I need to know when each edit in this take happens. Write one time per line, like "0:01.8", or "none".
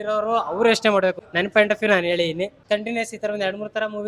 0:01.2
0:02.6